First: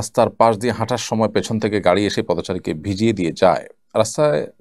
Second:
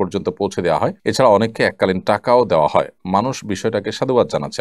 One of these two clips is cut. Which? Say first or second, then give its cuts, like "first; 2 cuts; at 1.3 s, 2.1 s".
second; 1 cut; at 1.0 s